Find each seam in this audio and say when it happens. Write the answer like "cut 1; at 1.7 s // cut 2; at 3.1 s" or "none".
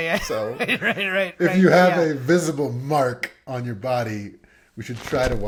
none